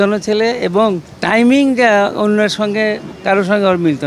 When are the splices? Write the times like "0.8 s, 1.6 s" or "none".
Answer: 1.2 s, 3.1 s